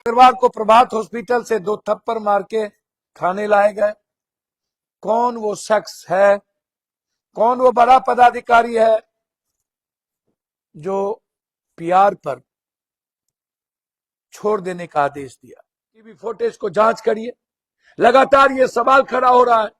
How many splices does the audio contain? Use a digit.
1